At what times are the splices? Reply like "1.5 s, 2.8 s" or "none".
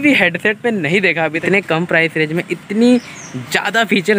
1.4 s

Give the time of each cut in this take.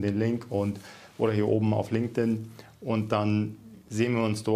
none

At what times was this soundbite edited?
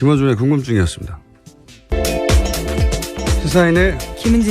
1.8 s

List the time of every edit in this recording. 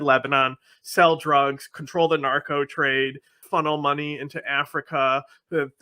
3.4 s

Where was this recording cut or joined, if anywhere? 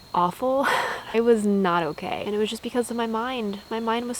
1.1 s, 2.2 s

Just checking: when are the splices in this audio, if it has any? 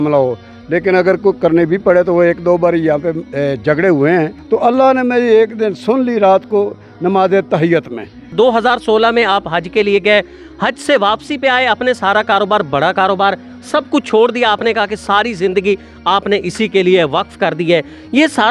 4.4 s, 8.3 s

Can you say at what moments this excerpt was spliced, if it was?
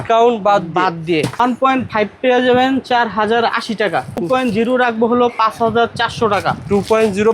1.4 s, 4.2 s

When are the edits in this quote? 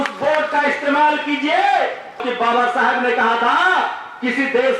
2.2 s

